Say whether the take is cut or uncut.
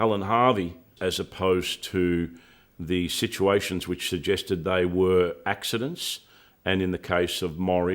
cut